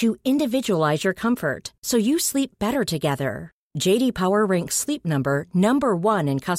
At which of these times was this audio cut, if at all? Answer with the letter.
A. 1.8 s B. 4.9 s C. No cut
C